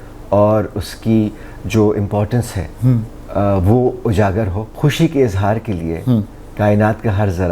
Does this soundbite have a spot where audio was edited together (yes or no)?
yes